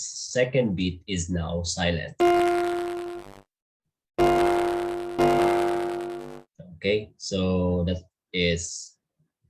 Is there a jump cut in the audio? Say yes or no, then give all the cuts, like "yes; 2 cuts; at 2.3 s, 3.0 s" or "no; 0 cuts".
no; 0 cuts